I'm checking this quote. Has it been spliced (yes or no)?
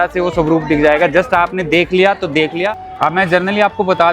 yes